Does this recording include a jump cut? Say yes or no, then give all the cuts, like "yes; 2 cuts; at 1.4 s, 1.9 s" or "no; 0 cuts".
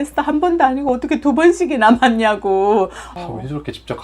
yes; 1 cut; at 3.1 s